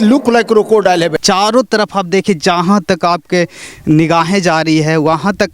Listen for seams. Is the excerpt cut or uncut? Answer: cut